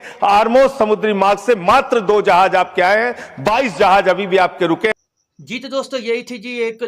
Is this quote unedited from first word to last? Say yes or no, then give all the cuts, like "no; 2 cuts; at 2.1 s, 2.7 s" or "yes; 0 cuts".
yes; 0 cuts